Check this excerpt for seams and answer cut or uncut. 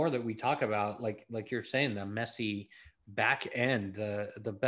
uncut